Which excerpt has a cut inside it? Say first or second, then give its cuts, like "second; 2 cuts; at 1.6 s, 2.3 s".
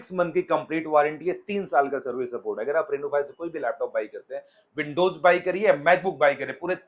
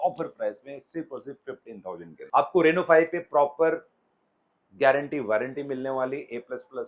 second; 1 cut; at 2.1 s